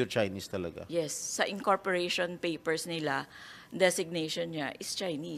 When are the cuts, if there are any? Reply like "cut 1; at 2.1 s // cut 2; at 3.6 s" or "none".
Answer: none